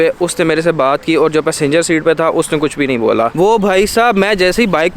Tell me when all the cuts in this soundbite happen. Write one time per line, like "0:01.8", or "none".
0:03.3